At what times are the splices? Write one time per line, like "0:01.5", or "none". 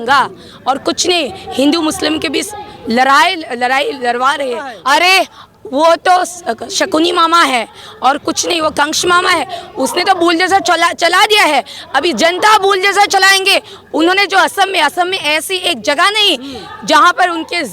0:04.7